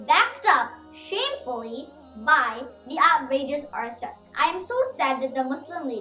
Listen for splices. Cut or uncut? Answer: cut